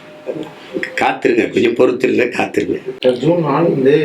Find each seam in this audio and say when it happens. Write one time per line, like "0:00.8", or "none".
0:02.9